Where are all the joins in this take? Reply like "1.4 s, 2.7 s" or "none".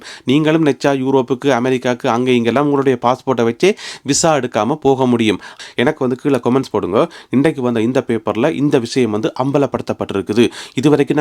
5.6 s